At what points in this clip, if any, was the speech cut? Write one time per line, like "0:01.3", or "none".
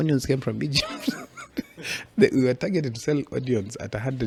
none

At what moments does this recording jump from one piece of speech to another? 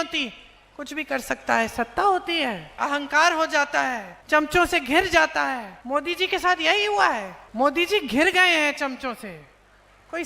0:02.8
0:04.1
0:05.7
0:07.4

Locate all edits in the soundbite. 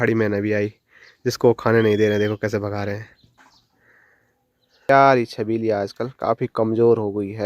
0:04.8

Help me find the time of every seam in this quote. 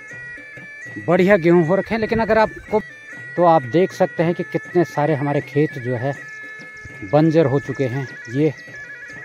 0:02.8

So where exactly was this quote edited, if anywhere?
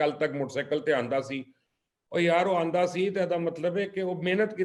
none

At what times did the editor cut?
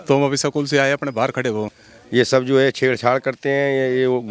0:01.7

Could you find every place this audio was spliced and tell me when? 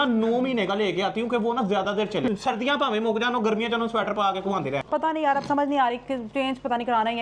none

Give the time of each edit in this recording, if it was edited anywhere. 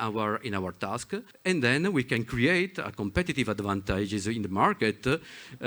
0:01.3

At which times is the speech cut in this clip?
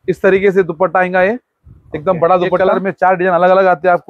0:02.6

